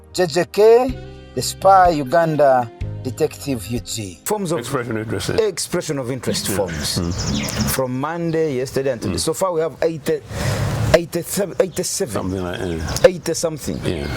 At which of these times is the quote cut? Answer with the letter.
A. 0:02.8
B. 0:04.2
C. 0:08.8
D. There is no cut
B